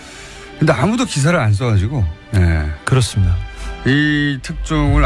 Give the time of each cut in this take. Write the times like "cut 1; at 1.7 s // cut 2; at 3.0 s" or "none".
none